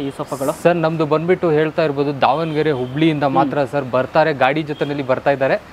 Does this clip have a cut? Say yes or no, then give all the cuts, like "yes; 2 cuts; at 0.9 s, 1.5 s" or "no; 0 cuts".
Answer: no; 0 cuts